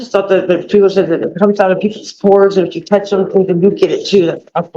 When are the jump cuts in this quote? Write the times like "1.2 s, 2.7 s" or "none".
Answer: none